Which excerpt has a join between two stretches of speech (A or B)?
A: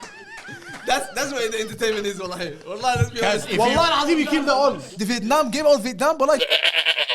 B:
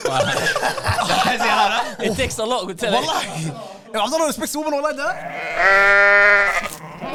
A